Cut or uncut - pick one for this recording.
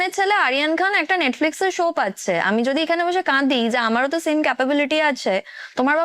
uncut